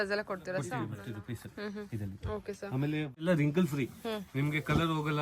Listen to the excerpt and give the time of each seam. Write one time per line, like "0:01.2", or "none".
0:01.1
0:03.2